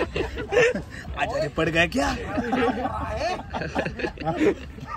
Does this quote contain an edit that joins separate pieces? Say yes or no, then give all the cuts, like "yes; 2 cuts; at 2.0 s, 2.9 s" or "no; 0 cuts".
no; 0 cuts